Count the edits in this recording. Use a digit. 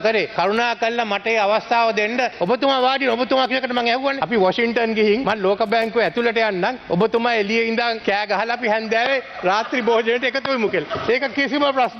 1